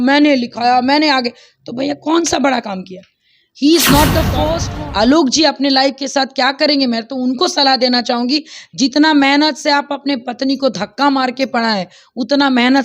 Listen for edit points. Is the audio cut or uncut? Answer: cut